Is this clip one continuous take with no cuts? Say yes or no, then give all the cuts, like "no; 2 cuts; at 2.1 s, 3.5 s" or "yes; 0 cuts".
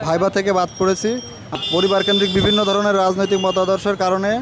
no; 1 cut; at 1.5 s